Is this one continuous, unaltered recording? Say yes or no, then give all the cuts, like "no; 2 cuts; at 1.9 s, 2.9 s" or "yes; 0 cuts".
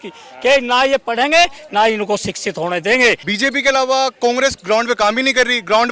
no; 1 cut; at 3.2 s